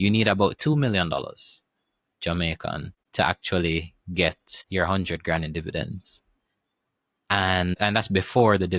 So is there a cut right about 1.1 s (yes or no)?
no